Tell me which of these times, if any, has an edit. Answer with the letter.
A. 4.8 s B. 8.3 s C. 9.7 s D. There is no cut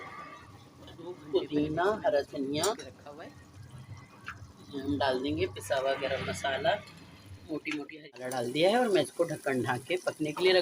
B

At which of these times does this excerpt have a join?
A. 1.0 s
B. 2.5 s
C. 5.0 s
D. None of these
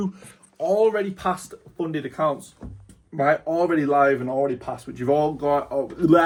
D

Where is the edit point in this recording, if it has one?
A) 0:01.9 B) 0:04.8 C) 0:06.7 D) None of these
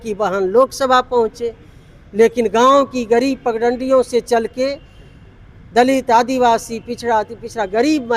D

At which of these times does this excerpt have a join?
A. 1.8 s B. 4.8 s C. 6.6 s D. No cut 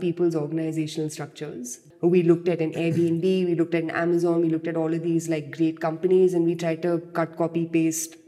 A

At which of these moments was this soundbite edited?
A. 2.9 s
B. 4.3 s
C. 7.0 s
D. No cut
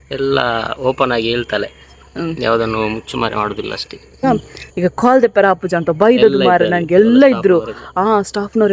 B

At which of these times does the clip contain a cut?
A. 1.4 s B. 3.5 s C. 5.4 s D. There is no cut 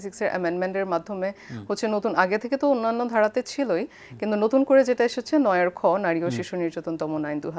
D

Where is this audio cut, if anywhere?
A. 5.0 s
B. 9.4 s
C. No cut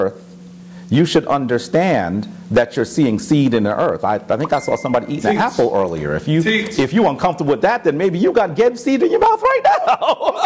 C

